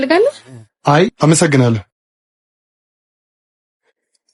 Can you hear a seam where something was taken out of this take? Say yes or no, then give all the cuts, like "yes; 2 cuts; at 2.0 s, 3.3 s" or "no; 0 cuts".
no; 0 cuts